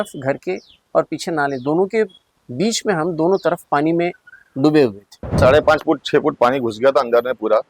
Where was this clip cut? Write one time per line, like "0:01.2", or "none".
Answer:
0:05.4